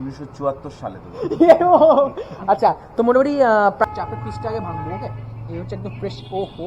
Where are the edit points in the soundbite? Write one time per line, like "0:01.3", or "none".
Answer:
0:03.9